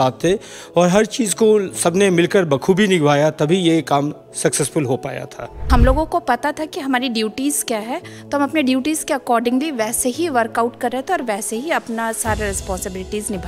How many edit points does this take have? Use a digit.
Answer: 1